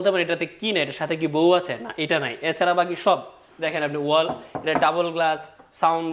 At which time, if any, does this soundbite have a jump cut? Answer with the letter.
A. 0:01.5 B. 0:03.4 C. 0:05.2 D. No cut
D